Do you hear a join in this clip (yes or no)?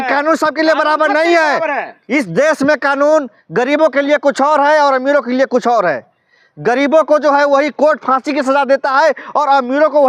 no